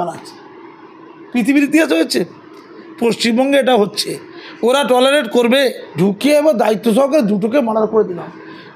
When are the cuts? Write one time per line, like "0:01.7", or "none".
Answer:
0:05.8